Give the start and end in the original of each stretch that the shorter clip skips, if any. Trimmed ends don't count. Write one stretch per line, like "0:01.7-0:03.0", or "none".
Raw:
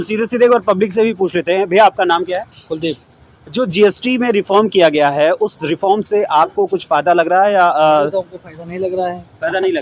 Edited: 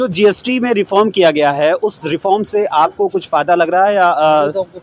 none